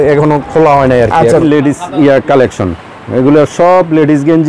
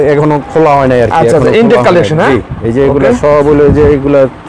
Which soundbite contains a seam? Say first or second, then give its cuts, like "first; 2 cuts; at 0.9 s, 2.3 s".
first; 1 cut; at 1.4 s